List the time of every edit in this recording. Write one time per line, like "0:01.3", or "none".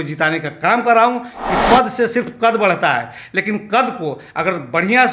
0:01.3